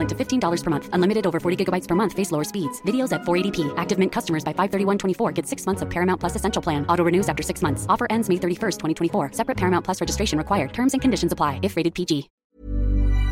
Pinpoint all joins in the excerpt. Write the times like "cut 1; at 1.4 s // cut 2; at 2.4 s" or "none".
cut 1; at 12.3 s